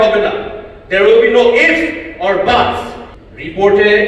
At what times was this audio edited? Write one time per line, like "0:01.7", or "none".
0:03.0